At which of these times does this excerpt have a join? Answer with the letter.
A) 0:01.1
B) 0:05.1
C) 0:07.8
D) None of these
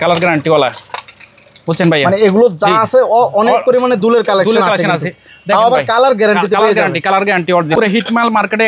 C